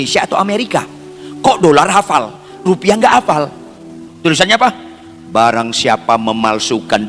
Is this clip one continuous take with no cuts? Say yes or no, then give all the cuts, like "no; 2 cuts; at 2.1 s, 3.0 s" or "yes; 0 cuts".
no; 1 cut; at 4.0 s